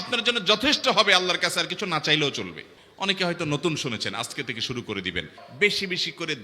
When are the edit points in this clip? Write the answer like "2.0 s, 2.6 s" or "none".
2.7 s, 5.4 s